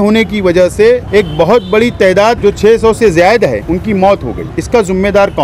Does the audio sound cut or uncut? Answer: cut